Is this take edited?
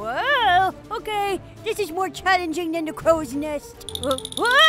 no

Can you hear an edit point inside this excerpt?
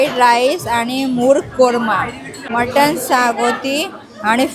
yes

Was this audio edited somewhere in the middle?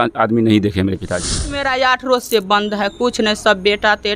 yes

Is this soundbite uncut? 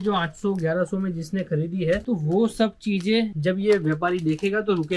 yes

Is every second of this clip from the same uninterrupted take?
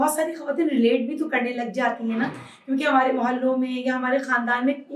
yes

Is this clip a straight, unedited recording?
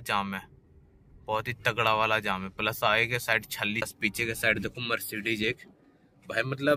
no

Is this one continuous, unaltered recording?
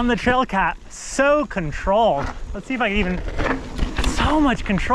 yes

